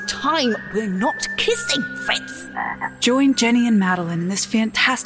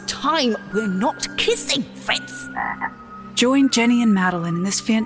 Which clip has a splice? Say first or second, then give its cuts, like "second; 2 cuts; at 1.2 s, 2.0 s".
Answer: first; 1 cut; at 2.9 s